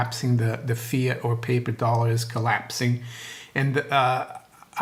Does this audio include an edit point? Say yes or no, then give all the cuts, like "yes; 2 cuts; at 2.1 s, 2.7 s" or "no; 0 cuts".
no; 0 cuts